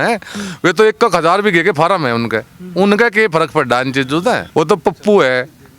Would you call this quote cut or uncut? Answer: cut